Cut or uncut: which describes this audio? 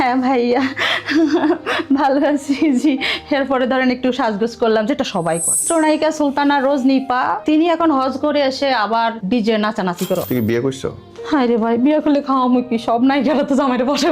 cut